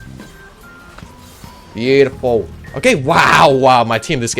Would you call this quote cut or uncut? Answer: cut